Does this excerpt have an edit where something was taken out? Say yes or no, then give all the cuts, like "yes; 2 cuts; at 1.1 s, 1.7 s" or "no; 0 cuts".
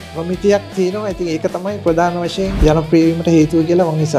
yes; 1 cut; at 2.6 s